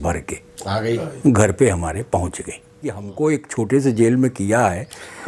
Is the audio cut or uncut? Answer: cut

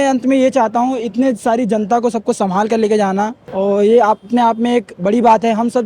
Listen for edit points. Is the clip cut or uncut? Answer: cut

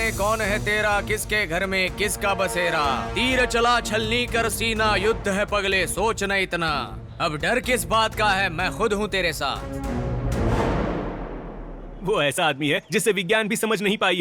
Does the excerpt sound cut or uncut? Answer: cut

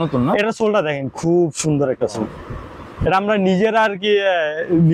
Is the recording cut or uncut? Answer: uncut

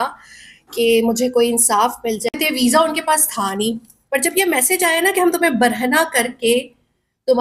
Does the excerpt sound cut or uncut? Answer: cut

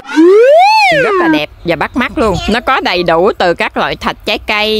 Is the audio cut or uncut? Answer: cut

